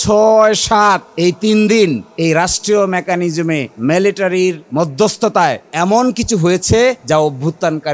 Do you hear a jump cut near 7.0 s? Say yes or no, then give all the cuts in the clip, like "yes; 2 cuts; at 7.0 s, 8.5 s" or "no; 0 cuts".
yes; 6 cuts; at 1.1 s, 2.1 s, 3.7 s, 4.6 s, 5.6 s, 7.0 s